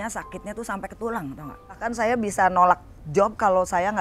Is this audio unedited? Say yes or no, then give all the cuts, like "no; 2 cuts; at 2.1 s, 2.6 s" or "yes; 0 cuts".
no; 1 cut; at 1.9 s